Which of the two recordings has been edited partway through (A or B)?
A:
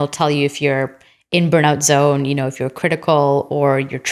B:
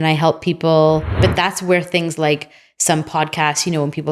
B